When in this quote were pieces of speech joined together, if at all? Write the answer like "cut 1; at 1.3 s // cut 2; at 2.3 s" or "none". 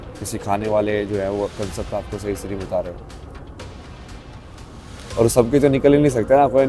none

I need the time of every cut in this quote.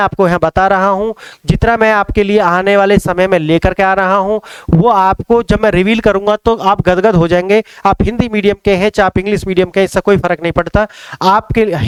none

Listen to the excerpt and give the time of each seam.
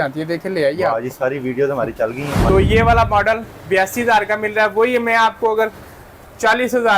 cut 1; at 2.4 s

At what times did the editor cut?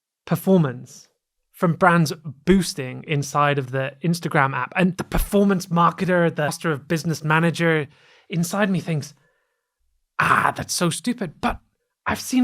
cut 1; at 5.0 s // cut 2; at 6.5 s

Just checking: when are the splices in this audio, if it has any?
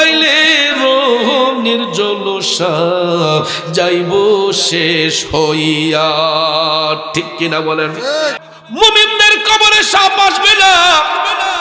cut 1; at 8.5 s

